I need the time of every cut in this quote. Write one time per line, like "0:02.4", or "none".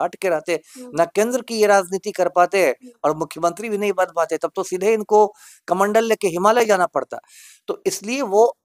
none